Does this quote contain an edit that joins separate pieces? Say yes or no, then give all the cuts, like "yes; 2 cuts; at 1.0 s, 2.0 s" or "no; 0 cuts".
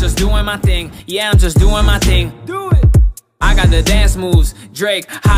yes; 1 cut; at 1.2 s